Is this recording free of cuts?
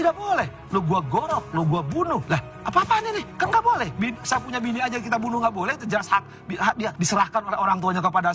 no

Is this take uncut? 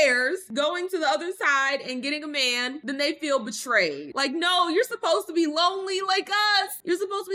yes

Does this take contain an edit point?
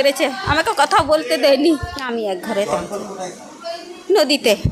yes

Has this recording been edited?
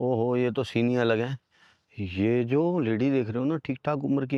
no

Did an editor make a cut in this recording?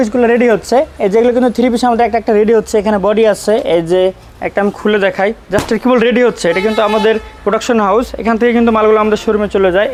no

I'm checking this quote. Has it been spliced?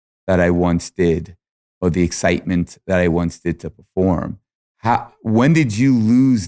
no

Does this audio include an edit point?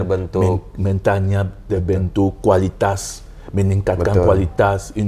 no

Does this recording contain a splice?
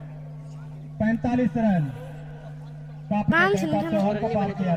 yes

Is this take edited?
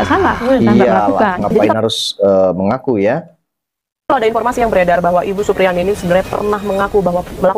no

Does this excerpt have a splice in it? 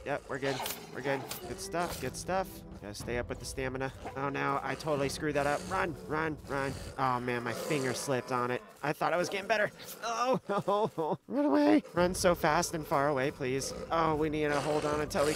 no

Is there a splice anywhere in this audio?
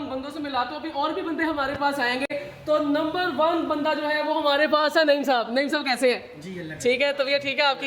no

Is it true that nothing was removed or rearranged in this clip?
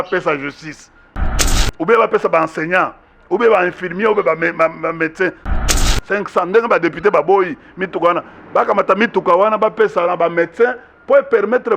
no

